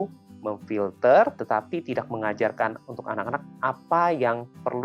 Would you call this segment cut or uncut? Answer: cut